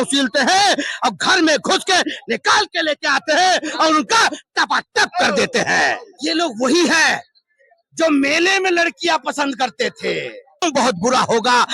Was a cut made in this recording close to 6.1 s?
yes; 2 cuts; at 6.1 s, 10.6 s

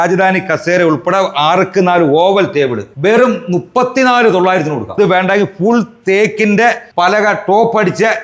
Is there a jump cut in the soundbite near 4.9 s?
yes; 2 cuts; at 4.9 s, 6.9 s

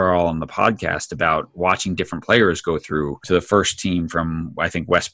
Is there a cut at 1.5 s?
no; 1 cut; at 3.2 s

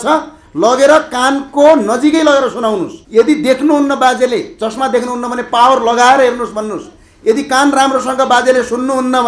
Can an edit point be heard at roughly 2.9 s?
yes; 1 cut; at 2.9 s

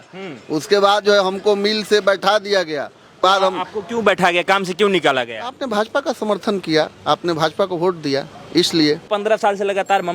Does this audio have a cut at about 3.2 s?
yes; 2 cuts; at 3.2 s, 9.1 s

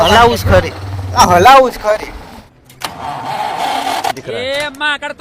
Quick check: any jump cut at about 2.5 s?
yes; 1 cut; at 2.5 s

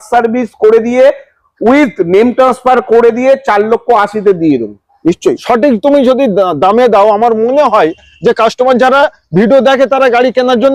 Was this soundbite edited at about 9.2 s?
no; 1 cut; at 4.9 s

